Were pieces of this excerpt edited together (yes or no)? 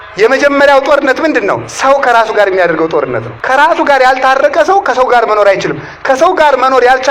yes